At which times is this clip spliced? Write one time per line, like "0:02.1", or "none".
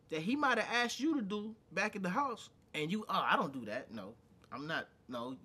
none